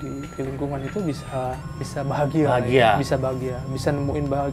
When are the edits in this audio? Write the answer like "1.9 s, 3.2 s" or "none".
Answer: 1.9 s